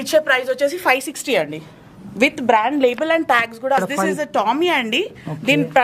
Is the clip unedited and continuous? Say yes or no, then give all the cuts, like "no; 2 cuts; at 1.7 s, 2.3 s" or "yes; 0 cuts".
no; 1 cut; at 3.8 s